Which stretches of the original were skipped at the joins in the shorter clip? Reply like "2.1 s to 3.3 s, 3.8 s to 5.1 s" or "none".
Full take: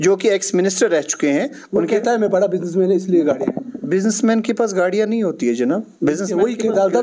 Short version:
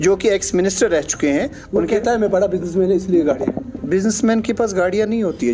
none